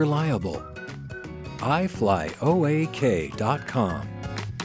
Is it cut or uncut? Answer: uncut